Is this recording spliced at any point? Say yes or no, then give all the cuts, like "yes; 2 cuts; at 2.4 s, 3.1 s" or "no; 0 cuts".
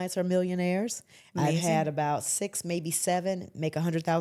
no; 0 cuts